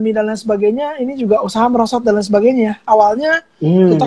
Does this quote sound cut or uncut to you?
uncut